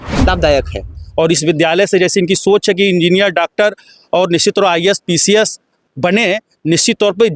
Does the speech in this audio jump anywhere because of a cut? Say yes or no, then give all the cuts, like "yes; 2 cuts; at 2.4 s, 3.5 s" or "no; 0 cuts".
yes; 1 cut; at 1.0 s